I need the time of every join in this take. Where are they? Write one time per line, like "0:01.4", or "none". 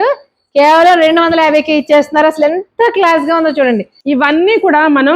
0:03.9